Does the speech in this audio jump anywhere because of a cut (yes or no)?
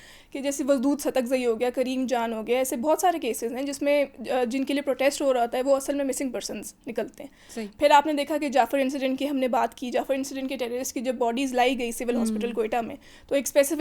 no